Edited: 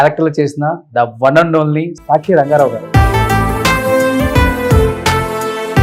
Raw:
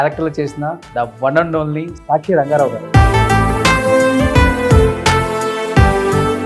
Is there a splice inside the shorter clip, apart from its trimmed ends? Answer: no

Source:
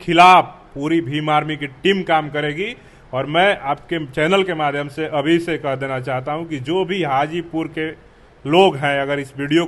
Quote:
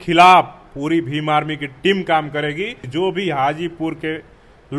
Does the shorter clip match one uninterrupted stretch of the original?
no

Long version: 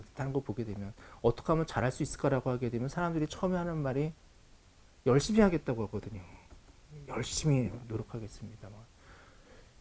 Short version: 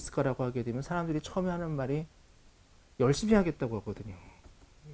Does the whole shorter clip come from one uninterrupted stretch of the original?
yes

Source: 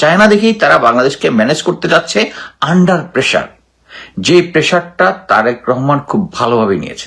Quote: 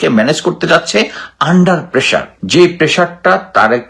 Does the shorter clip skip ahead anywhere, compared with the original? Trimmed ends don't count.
yes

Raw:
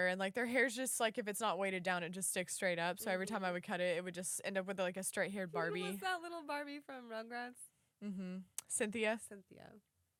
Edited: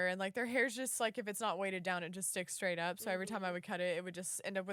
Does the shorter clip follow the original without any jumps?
yes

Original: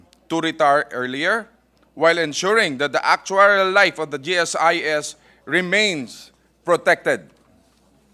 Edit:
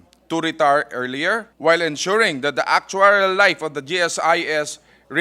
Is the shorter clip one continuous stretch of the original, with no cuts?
no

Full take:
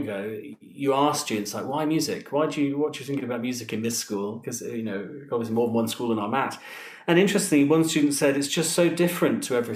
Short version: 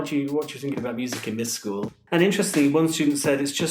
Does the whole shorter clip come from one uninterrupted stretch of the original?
no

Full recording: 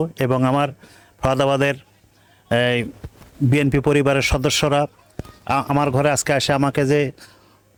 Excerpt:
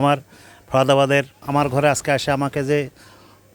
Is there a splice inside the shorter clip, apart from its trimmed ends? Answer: yes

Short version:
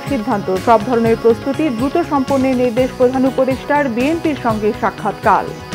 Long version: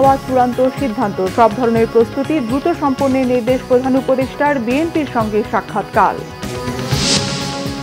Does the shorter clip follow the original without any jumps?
yes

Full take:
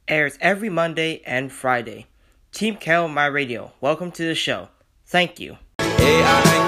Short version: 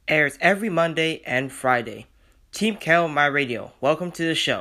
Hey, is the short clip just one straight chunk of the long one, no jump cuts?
yes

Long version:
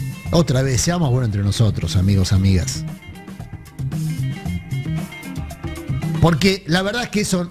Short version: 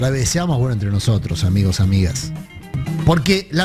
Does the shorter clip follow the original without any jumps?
no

